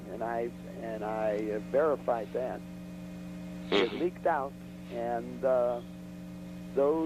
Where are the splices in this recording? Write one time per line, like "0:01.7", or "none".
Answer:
0:01.6

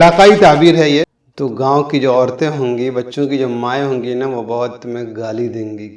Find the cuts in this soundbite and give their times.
0:01.2

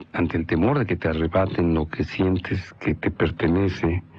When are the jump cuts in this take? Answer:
none

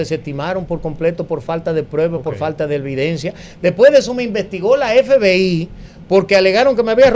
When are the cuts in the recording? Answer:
none

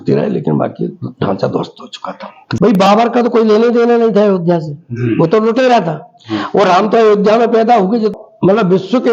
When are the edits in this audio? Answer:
0:02.4
0:08.1

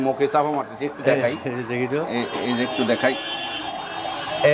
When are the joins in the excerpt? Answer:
none

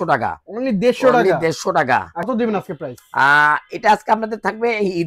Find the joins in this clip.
0:02.3

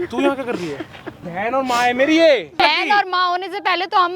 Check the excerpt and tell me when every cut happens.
0:01.2
0:02.6

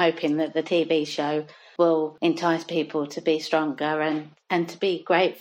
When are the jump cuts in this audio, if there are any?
0:01.6
0:02.1

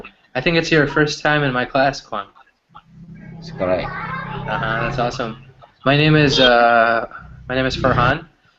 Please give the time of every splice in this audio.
0:05.3

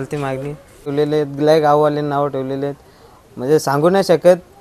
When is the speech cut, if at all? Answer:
0:00.9

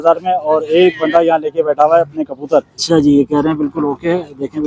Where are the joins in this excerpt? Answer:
0:02.8

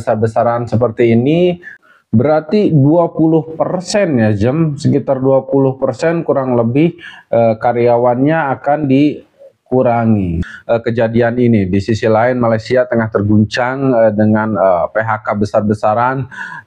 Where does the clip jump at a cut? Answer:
0:01.7
0:10.4

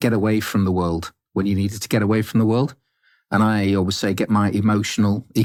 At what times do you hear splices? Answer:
none

